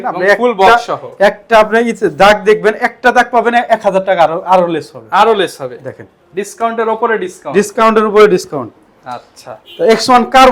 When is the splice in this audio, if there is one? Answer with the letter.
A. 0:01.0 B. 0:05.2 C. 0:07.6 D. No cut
D